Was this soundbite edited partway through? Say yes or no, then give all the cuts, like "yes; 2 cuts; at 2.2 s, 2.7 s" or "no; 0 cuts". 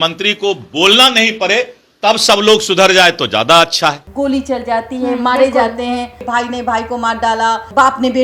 yes; 2 cuts; at 4.1 s, 6.2 s